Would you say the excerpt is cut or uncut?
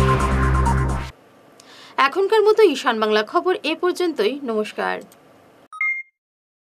uncut